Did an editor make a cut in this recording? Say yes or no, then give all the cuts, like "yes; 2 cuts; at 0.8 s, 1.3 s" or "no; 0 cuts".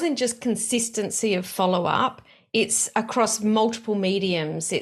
no; 0 cuts